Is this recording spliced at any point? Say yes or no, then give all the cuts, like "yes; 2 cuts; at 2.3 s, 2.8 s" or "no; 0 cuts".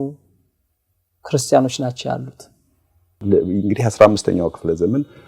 yes; 1 cut; at 3.1 s